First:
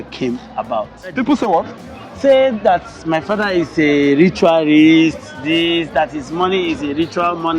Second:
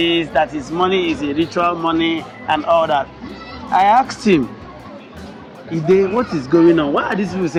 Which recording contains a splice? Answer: first; 1 cut; at 1.1 s

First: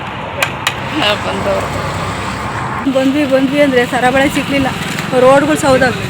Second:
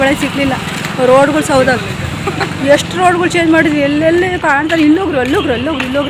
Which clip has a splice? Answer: first; 1 cut; at 2.9 s

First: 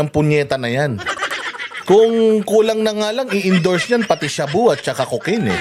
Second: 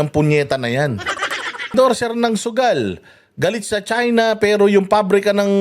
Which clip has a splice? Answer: second; 1 cut; at 1.7 s

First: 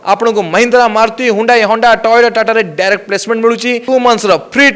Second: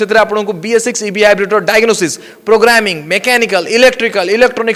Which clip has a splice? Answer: first; 1 cut; at 3.8 s

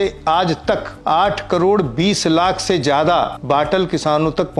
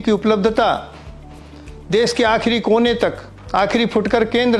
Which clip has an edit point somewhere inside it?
first; 2 cuts; at 0.9 s, 3.4 s

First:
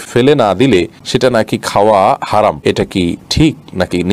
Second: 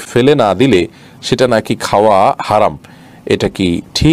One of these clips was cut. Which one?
first; 2 cuts; at 1.0 s, 3.1 s

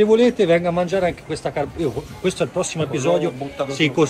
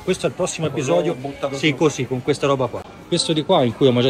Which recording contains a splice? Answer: second; 1 cut; at 2.9 s

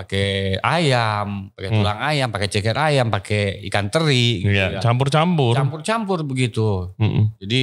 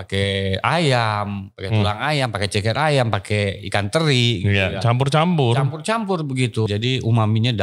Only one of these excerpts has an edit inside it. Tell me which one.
second; 1 cut; at 6.7 s

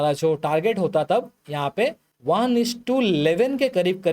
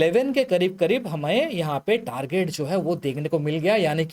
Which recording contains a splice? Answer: first; 1 cut; at 2.1 s

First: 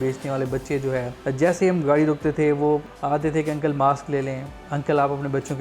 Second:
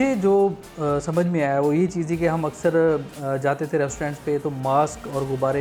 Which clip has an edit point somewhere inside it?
first; 2 cuts; at 1.1 s, 2.9 s

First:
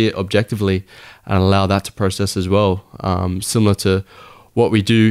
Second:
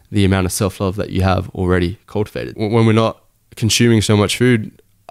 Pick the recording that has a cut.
second; 1 cut; at 2.5 s

